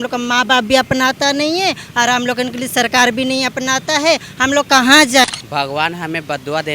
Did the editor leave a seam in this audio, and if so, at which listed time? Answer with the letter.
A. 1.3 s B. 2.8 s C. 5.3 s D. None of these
C